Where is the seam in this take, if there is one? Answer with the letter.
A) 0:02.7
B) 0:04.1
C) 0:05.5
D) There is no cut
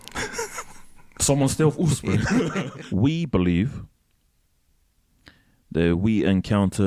A